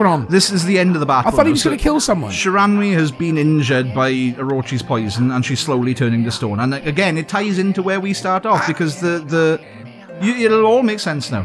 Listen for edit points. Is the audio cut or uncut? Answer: uncut